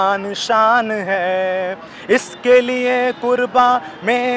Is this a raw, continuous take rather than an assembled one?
yes; 0 cuts

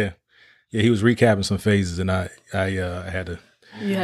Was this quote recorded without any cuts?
yes; 0 cuts

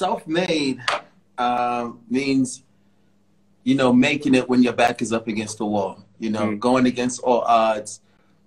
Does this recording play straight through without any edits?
yes; 0 cuts

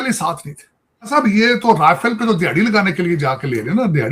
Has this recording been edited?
yes; 1 cut; at 1.1 s

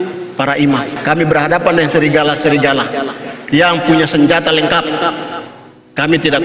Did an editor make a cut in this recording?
yes; 1 cut; at 0.9 s

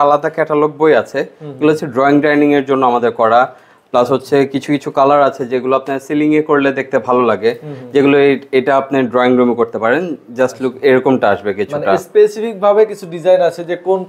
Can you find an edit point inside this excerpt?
no; 0 cuts

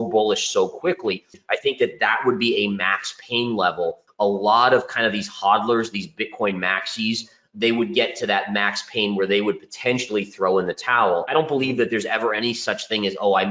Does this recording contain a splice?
yes; 3 cuts; at 1.4 s, 4.0 s, 11.3 s

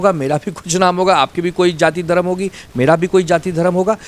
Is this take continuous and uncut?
yes; 0 cuts

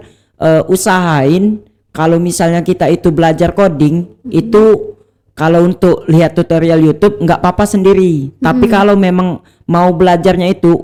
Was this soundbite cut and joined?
no; 0 cuts

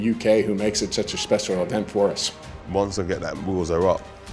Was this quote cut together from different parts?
yes; 1 cut; at 2.5 s

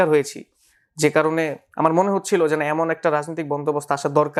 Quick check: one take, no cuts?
yes; 0 cuts

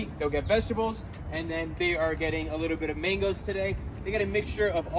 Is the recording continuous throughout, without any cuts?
yes; 0 cuts

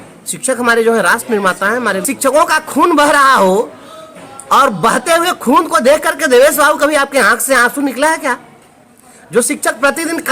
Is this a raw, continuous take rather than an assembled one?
no; 1 cut; at 2.0 s

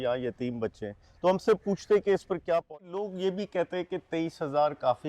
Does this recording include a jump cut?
yes; 1 cut; at 2.9 s

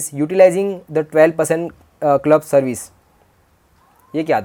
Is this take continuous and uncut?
yes; 0 cuts

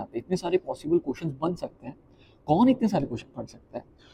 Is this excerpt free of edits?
yes; 0 cuts

